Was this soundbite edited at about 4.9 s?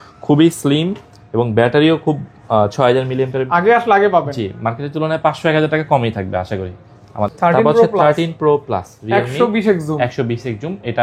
no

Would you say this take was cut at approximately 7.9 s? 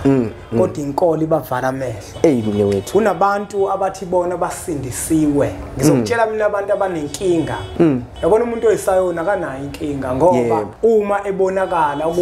yes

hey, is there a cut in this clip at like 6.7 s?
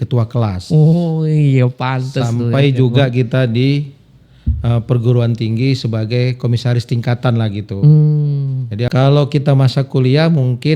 no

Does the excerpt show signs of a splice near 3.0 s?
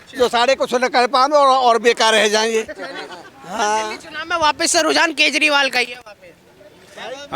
no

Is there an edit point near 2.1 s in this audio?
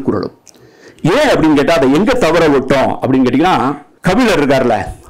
no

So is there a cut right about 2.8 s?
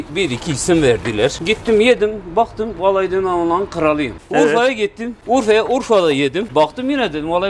no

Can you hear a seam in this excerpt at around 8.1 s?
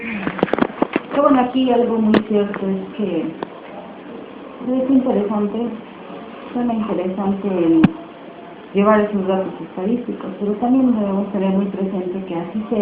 no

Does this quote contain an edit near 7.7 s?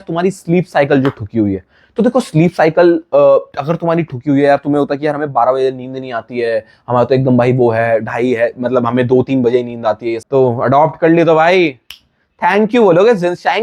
no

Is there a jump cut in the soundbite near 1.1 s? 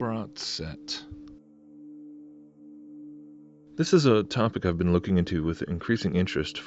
no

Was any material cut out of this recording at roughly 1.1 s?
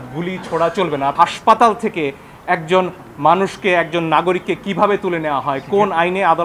yes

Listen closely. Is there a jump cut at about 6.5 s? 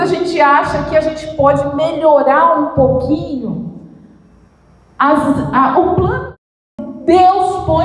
yes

